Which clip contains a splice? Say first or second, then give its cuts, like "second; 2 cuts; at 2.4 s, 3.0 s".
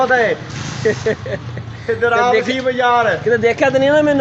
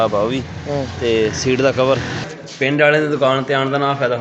second; 1 cut; at 2.3 s